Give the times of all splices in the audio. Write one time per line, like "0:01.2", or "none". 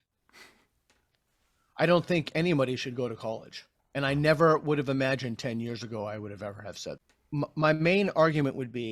0:07.0

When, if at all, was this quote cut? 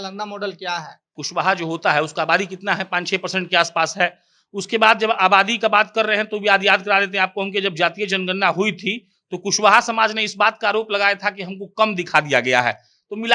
0:01.2

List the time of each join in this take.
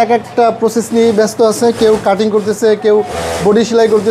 none

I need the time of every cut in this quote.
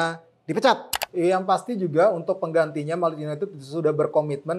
0:01.0

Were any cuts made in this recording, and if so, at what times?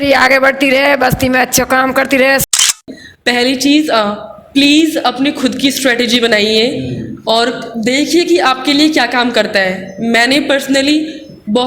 0:02.6

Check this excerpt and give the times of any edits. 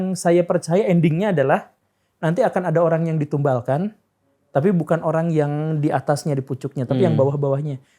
none

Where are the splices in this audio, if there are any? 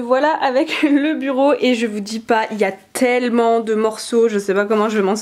none

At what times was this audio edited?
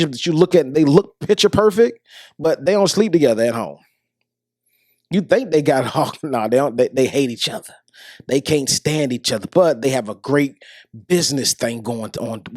none

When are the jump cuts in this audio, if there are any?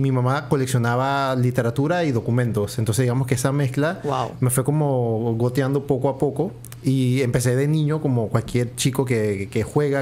none

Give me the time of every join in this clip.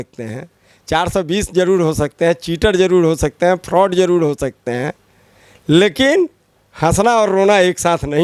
none

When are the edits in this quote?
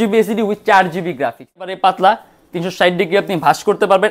0:01.7

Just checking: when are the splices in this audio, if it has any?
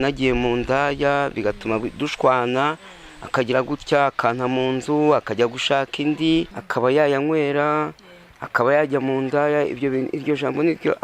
0:06.6

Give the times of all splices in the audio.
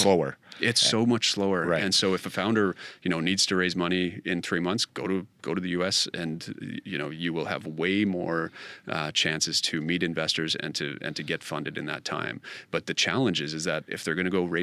none

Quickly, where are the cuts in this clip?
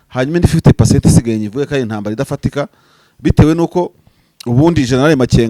none

